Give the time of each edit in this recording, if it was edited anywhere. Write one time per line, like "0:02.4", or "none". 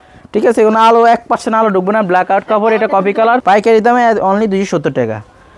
0:03.4